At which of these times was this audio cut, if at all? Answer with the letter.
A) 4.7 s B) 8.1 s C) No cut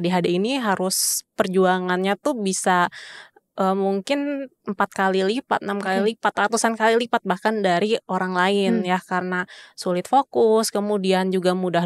C